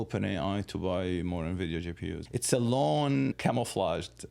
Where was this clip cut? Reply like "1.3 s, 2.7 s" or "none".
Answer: 2.2 s, 3.4 s